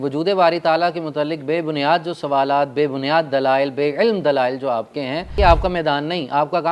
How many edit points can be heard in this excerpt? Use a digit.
1